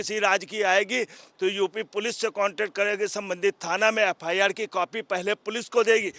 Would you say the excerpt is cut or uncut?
uncut